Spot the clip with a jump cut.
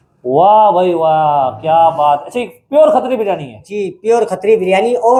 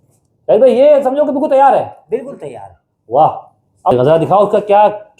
second; 1 cut; at 3.9 s

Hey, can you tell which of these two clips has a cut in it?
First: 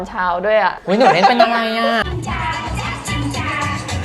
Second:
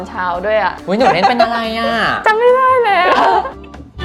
first; 1 cut; at 2.1 s

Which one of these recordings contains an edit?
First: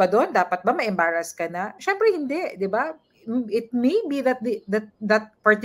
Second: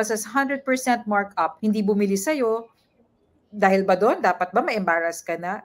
second; 1 cut; at 1.5 s

